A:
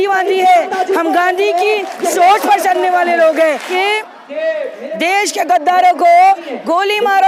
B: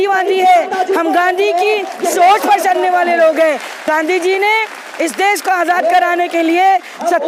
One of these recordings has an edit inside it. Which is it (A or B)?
A